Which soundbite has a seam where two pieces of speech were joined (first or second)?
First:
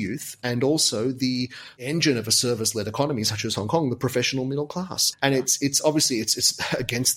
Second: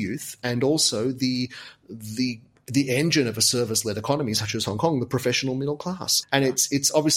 first